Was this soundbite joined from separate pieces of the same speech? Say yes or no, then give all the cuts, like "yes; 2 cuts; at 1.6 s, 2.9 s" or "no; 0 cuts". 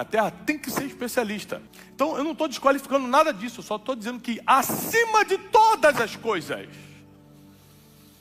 yes; 1 cut; at 1.8 s